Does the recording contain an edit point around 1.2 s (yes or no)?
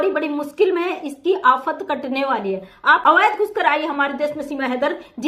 no